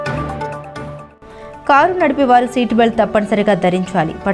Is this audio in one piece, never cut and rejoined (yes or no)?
no